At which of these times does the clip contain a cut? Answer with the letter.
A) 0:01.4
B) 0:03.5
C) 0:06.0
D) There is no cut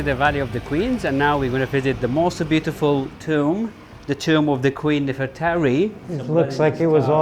C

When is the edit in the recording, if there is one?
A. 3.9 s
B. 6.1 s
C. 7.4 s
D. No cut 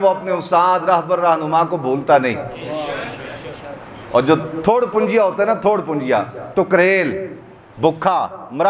D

